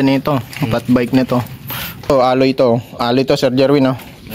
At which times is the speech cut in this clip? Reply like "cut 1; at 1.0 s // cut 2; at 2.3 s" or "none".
cut 1; at 2.1 s